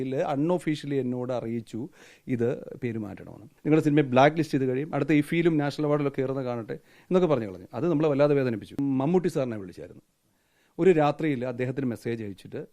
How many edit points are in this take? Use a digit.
2